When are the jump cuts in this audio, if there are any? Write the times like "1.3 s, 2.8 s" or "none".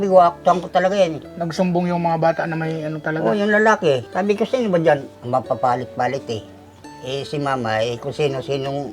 1.3 s, 4.1 s, 5.1 s